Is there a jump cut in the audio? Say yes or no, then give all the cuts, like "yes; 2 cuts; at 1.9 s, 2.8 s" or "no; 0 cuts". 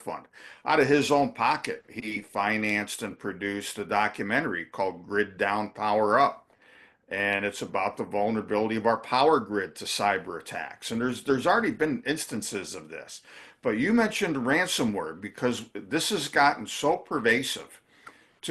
no; 0 cuts